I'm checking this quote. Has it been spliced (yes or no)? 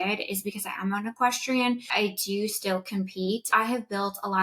yes